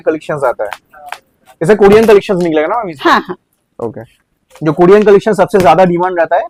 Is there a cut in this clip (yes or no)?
no